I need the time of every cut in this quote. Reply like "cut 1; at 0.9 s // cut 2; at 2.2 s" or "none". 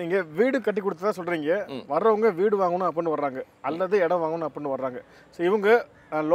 none

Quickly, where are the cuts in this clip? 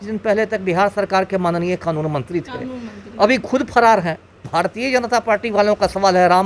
cut 1; at 4.4 s

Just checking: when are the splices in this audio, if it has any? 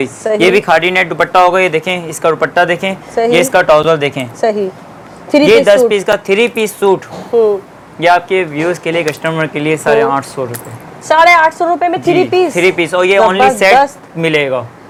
none

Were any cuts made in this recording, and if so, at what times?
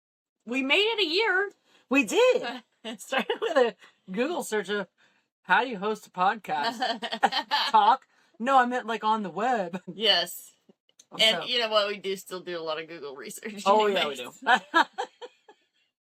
none

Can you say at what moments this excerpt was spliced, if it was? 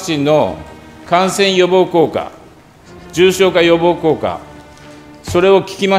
none

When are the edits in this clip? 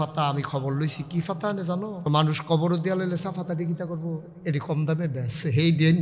cut 1; at 2.0 s

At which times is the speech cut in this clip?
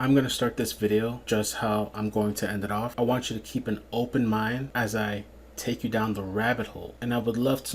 cut 1; at 1.2 s // cut 2; at 2.9 s // cut 3; at 4.7 s // cut 4; at 6.8 s

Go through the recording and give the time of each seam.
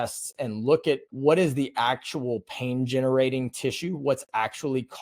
cut 1; at 1.1 s

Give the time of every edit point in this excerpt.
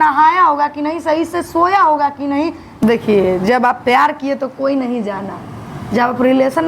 cut 1; at 2.8 s

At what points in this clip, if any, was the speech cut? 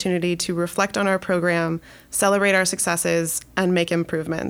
none

